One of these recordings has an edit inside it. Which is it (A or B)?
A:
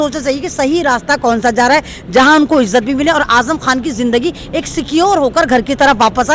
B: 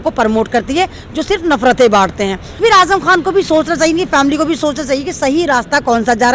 B